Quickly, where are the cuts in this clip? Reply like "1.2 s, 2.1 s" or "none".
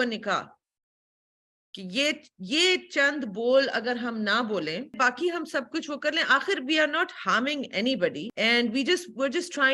4.9 s, 8.3 s